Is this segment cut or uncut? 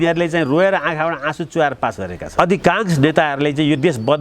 cut